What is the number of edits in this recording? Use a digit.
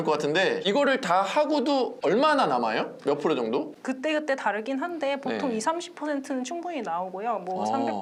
0